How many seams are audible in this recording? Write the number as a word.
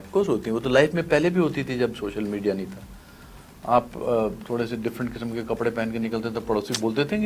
zero